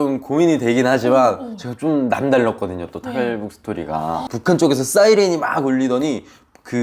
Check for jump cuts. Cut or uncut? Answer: cut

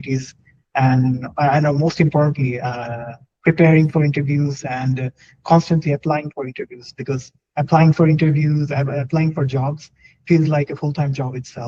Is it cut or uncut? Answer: uncut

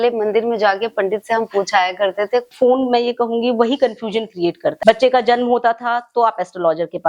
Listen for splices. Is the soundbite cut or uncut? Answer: cut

